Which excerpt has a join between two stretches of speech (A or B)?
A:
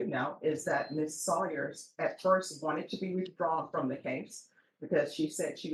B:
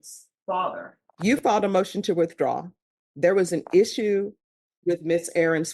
B